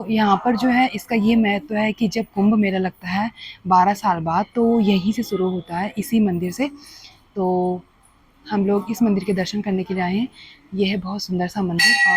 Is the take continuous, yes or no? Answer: yes